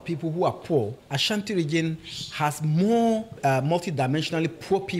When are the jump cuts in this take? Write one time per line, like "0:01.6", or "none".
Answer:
0:01.1